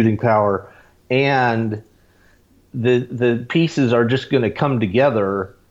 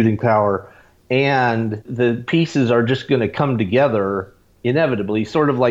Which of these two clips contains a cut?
second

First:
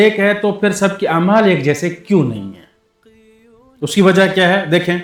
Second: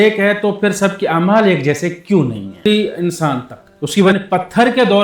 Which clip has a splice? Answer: second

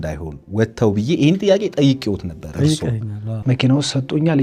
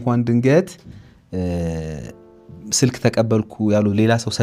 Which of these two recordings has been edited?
first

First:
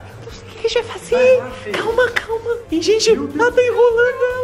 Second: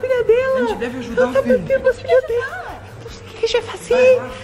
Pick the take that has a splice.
first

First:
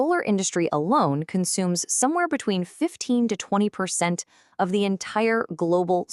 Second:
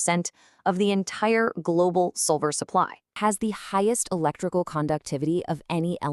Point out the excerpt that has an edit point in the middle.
second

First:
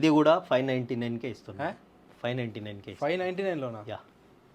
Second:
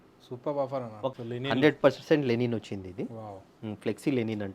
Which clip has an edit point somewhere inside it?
second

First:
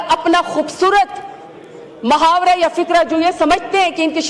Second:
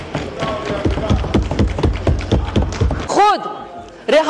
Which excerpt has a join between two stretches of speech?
second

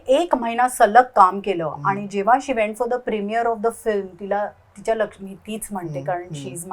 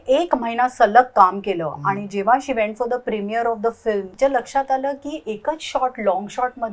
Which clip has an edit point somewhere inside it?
second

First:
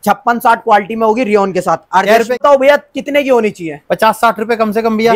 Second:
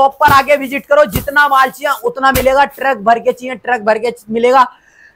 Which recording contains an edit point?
first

